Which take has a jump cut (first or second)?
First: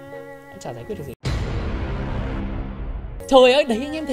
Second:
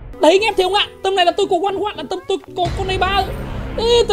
first